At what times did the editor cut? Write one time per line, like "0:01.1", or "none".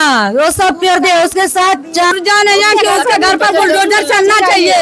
0:02.1